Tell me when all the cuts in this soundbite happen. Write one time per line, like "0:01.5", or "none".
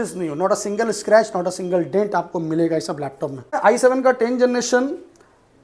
0:03.6